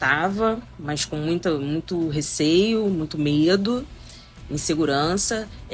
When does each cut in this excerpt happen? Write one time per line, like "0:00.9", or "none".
none